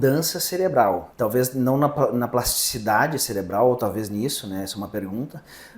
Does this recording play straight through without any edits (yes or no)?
no